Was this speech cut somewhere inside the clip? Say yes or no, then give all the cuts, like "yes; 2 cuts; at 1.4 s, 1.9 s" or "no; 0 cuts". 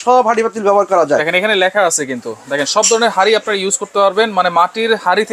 no; 0 cuts